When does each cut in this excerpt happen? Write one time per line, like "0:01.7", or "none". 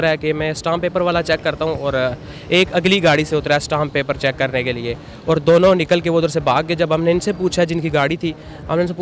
none

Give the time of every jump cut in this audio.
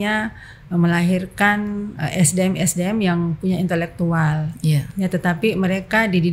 none

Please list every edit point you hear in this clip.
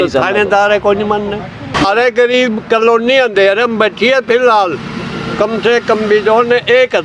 0:01.9

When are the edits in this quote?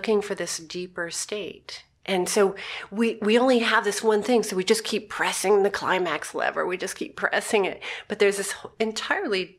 none

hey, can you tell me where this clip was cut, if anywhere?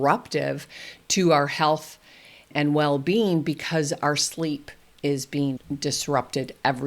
0:05.6

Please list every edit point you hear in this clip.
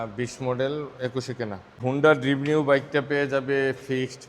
0:01.8

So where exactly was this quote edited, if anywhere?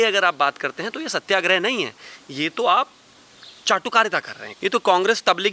0:04.4

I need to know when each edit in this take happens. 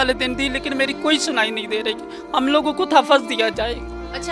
none

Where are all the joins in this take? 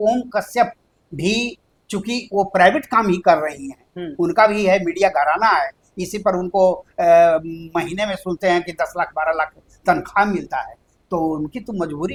none

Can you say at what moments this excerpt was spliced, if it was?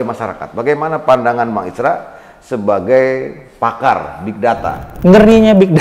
0:04.9

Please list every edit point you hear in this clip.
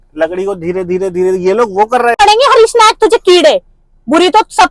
0:02.2

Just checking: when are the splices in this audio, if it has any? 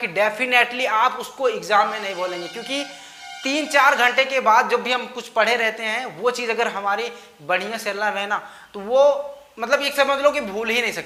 none

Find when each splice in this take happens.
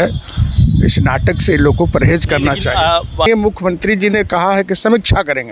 0:03.3

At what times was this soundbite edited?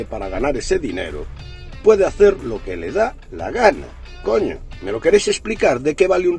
0:04.7

